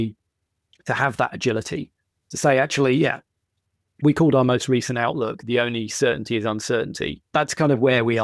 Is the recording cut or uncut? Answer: cut